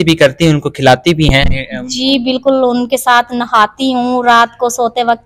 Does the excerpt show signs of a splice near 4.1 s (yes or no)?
no